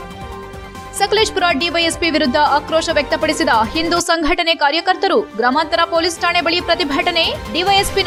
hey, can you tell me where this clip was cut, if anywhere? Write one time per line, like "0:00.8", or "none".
none

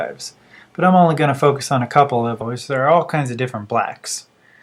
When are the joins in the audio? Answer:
none

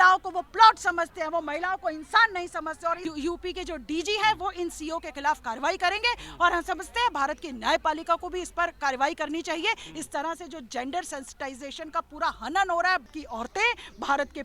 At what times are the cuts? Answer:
0:03.0
0:13.0

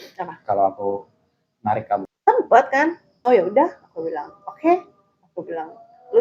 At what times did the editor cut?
0:02.1
0:03.1

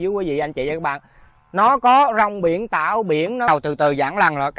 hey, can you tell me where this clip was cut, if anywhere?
0:03.5

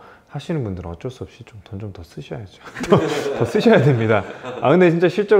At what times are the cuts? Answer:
none

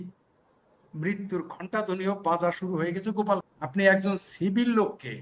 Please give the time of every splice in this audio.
0:03.4

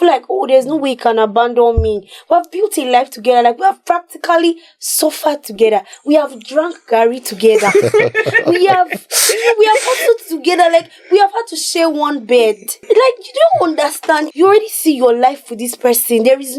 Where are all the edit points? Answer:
0:12.7
0:14.3

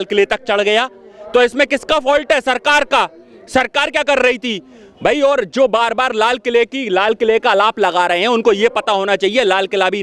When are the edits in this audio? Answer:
none

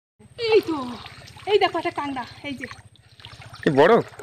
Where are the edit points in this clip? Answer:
none

